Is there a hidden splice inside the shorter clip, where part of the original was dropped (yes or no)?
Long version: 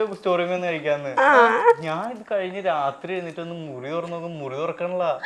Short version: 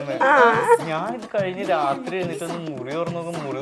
no